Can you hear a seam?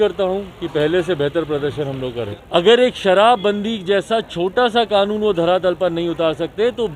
yes; 1 cut; at 2.3 s

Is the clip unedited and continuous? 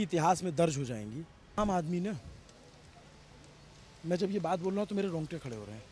no; 1 cut; at 1.6 s

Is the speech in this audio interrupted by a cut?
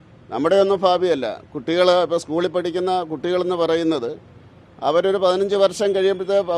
no; 0 cuts

